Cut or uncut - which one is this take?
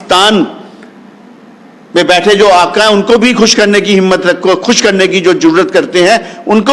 uncut